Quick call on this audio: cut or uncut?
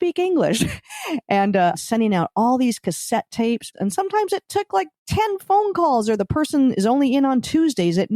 cut